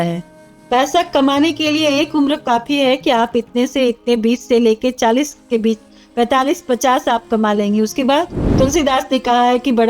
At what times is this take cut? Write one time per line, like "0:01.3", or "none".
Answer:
0:08.6